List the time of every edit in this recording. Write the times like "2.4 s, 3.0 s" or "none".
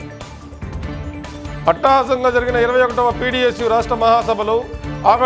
none